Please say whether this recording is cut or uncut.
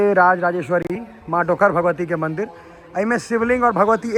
uncut